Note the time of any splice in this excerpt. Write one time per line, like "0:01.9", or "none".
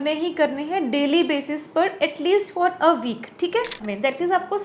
0:03.7